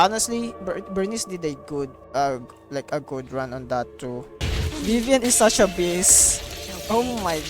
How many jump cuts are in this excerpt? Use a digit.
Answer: 1